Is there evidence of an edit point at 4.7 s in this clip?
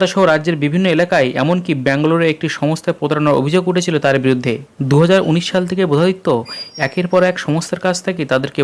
no; 0 cuts

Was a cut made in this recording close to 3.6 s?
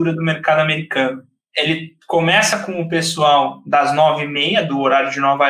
no; 1 cut; at 1.5 s

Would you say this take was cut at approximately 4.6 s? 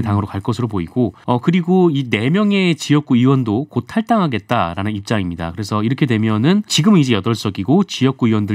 no; 2 cuts; at 1.2 s, 6.7 s

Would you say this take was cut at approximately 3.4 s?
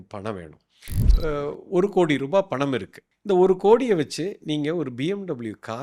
no; 1 cut; at 1.0 s

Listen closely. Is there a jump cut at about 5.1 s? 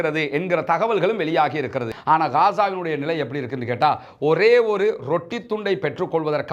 no; 1 cut; at 1.9 s

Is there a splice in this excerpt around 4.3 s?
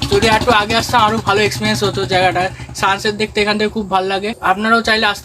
yes; 1 cut; at 4.3 s

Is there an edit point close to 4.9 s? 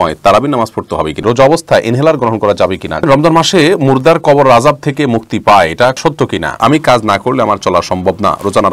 no; 3 cuts; at 1.2 s, 3.0 s, 6.1 s

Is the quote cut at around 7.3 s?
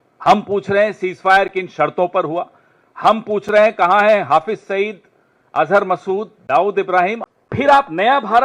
yes; 1 cut; at 7.3 s

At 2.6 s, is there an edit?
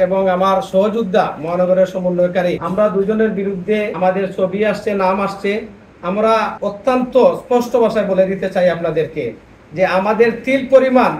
yes; 3 cuts; at 2.6 s, 3.9 s, 6.5 s

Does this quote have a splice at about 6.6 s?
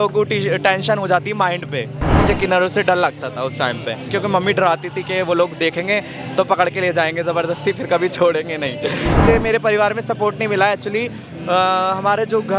no; 3 cuts; at 2.2 s, 4.1 s, 9.2 s

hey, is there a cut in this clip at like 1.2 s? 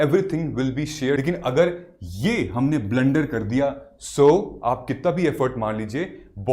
yes; 1 cut; at 1.2 s

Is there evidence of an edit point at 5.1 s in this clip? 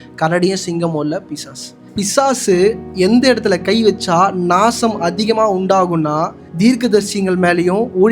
no; 3 cuts; at 1.9 s, 2.9 s, 6.4 s

